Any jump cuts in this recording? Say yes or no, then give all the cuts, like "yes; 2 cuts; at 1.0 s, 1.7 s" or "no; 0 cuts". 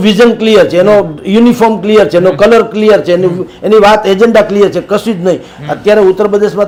no; 0 cuts